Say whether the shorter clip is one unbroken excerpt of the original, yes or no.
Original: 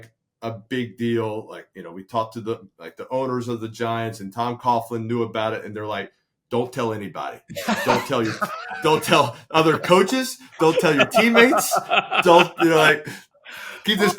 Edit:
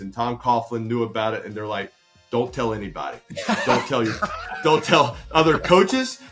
yes